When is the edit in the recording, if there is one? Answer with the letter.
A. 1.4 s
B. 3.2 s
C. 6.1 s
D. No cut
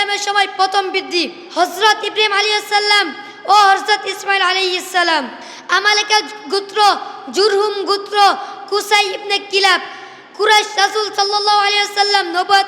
A